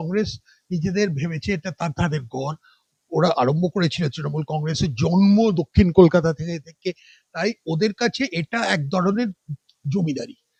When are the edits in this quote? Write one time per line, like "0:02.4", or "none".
none